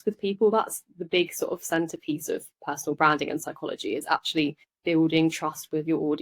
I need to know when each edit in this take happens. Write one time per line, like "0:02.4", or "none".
0:04.7